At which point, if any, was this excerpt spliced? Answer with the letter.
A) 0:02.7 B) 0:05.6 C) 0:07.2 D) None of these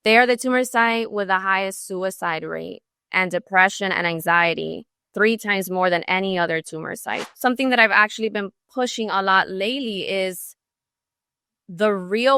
C